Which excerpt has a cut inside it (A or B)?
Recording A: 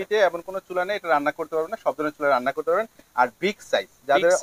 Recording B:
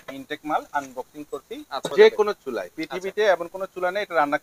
B